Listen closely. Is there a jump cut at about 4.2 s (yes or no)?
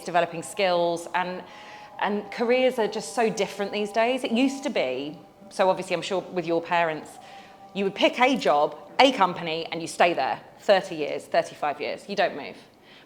no